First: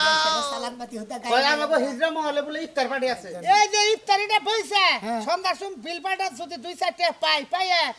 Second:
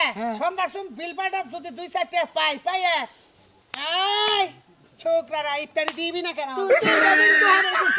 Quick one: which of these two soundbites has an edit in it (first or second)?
first